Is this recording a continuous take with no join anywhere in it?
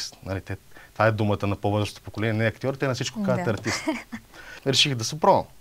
no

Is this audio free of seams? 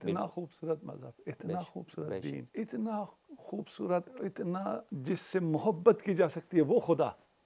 no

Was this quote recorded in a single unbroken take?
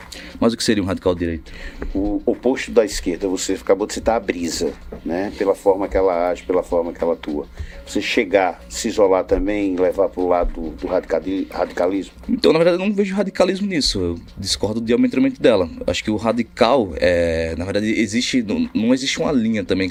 yes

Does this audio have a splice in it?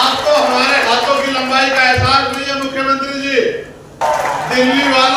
yes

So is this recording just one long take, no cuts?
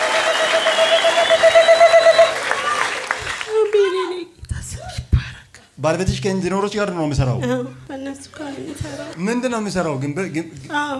no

